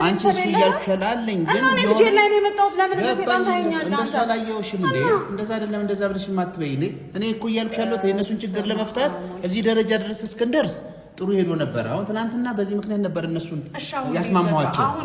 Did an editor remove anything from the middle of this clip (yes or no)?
no